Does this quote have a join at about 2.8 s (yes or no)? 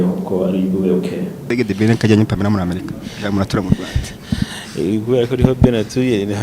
no